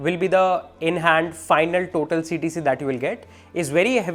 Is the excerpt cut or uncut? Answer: uncut